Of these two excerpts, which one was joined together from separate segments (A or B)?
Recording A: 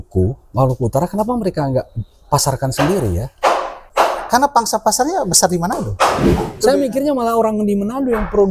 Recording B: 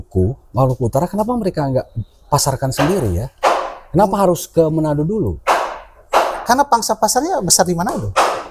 A